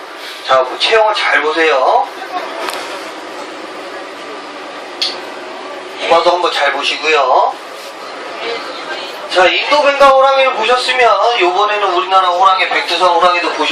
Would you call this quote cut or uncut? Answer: cut